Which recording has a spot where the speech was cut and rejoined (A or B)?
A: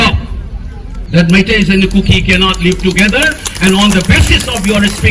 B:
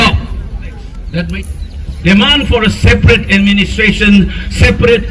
B